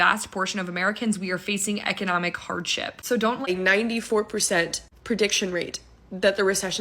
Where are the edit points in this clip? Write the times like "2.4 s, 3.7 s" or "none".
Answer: 3.5 s